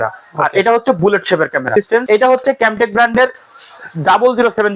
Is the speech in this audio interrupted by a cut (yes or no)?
yes